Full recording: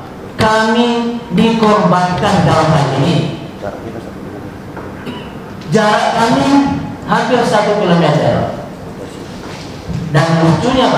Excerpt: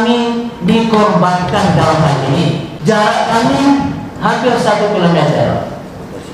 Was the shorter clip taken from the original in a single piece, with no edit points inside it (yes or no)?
no